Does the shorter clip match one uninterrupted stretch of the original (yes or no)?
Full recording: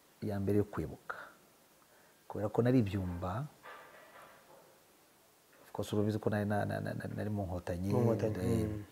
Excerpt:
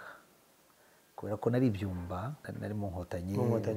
no